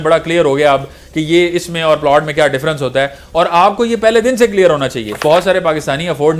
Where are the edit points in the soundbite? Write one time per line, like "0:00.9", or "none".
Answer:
0:05.2